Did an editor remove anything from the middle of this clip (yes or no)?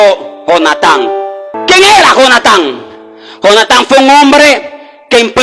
yes